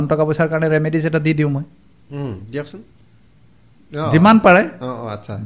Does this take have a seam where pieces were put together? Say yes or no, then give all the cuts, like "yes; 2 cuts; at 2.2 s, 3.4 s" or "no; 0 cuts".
no; 0 cuts